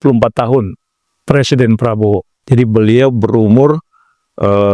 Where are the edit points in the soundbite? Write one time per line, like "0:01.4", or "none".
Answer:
0:01.1
0:02.3